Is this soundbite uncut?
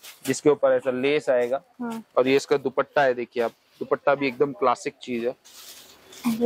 yes; 0 cuts

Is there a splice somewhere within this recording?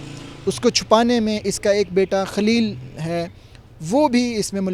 no; 0 cuts

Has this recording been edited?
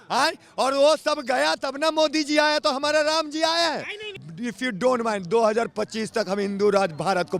yes; 1 cut; at 4.1 s

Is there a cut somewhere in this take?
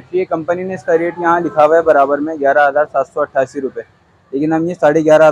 no; 0 cuts

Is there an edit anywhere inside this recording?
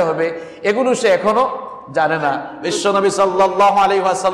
yes; 1 cut; at 2.5 s

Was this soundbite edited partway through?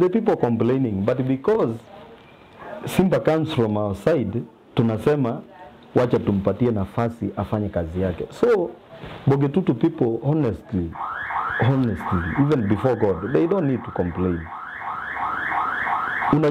no; 0 cuts

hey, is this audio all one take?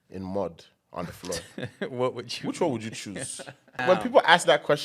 no; 1 cut; at 3.8 s

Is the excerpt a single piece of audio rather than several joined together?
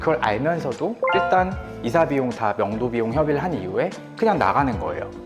yes; 0 cuts

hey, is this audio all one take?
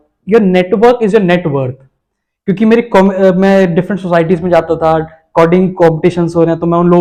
yes; 0 cuts

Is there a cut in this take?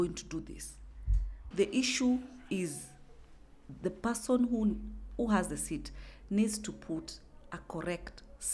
yes; 1 cut; at 1.5 s

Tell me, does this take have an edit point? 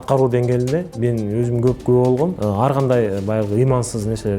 yes; 1 cut; at 2.4 s

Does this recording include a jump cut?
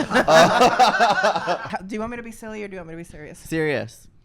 yes; 1 cut; at 1.7 s

